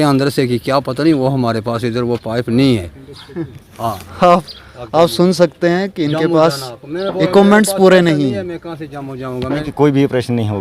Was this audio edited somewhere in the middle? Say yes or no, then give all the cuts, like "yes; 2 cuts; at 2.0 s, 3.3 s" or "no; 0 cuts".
yes; 1 cut; at 9.6 s